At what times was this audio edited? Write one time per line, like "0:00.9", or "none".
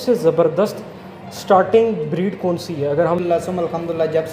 0:03.2

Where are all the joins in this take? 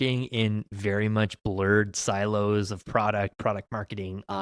none

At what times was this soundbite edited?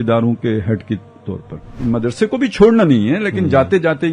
0:01.8

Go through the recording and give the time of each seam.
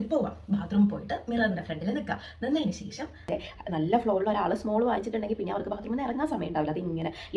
0:03.3

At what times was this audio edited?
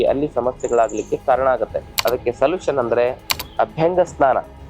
0:01.9

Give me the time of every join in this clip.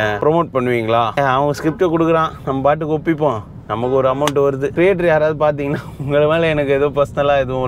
0:01.1
0:04.7

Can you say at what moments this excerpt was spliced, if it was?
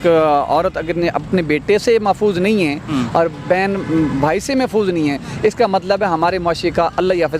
none

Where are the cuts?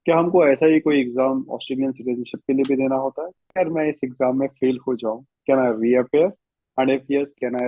0:03.4

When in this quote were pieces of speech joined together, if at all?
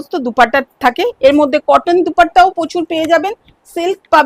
none

